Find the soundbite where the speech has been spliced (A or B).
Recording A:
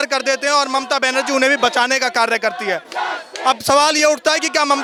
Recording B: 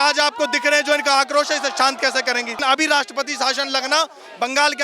B